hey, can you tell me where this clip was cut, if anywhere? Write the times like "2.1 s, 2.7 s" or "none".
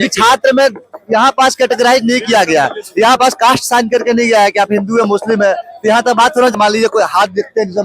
6.5 s